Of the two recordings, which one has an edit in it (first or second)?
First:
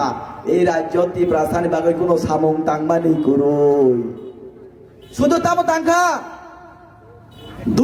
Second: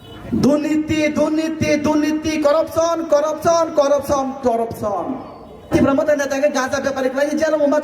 second